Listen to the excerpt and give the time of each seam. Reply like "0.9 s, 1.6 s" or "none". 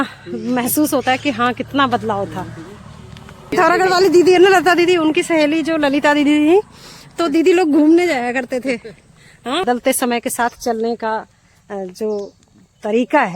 3.5 s, 9.6 s